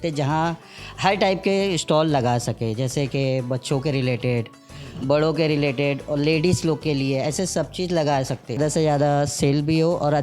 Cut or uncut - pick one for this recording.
cut